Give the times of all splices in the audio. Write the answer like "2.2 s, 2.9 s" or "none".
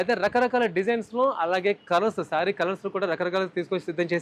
none